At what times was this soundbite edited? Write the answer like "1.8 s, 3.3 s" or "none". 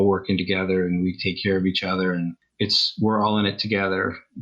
2.4 s